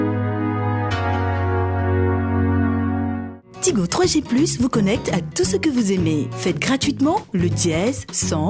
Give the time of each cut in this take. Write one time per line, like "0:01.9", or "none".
0:03.2